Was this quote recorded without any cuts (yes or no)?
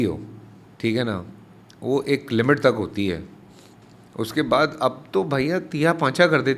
yes